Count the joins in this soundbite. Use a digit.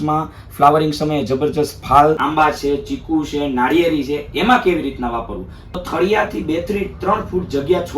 2